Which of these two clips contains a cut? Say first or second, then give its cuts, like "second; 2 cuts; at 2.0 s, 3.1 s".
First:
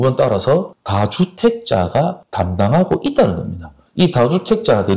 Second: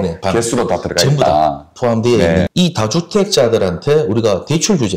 second; 1 cut; at 2.5 s